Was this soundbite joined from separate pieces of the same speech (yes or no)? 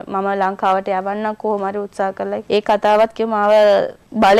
no